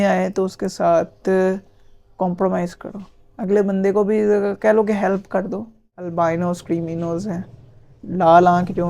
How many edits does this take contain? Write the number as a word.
one